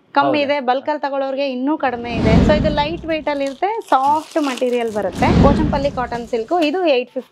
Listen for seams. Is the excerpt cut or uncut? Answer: cut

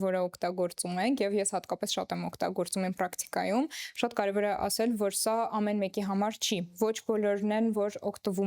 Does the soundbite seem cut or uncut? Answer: uncut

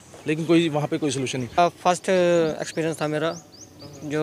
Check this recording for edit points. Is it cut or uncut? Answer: cut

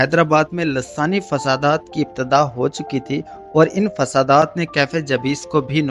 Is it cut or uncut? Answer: uncut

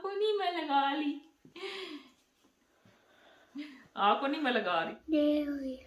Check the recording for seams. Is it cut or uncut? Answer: cut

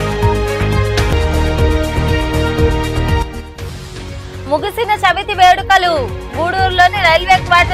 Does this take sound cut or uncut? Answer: cut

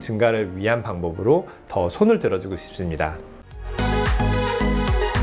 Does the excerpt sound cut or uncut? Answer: cut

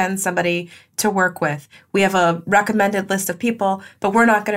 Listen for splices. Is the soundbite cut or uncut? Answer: uncut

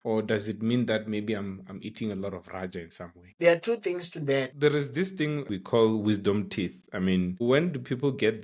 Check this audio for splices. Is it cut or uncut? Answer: cut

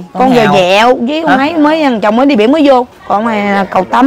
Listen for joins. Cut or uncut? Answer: cut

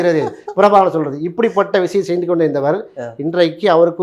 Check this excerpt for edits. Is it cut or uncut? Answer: uncut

